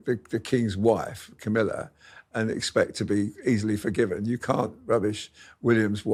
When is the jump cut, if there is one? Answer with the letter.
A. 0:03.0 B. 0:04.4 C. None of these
C